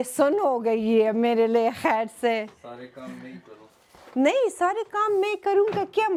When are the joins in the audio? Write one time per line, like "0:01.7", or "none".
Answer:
none